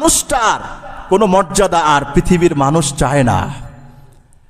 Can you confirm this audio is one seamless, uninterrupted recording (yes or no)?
yes